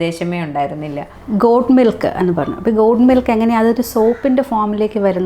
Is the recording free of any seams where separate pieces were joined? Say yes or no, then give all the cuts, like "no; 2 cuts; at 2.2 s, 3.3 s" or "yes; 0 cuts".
yes; 0 cuts